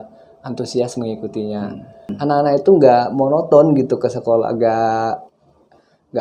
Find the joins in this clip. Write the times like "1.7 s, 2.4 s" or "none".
2.1 s